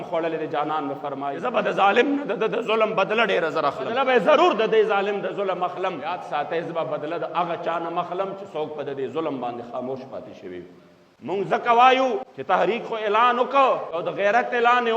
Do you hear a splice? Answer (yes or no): yes